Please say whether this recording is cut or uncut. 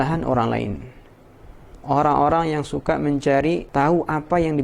cut